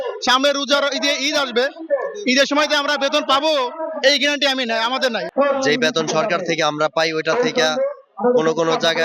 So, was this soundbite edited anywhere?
yes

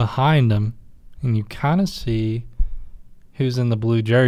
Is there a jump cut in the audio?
no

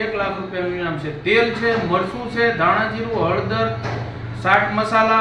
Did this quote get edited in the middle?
no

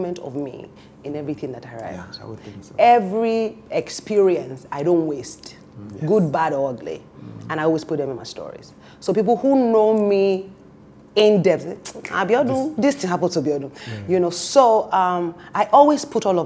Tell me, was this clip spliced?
no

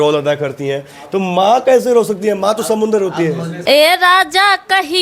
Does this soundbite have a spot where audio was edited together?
yes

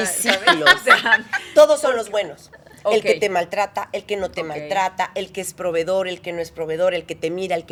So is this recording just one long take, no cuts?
yes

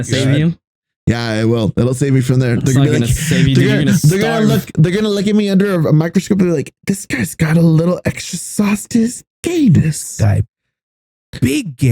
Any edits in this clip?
no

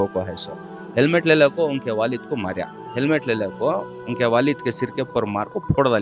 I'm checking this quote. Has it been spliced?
yes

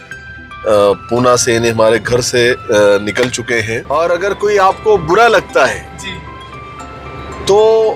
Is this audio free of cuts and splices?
no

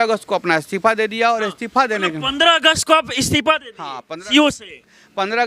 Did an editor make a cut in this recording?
no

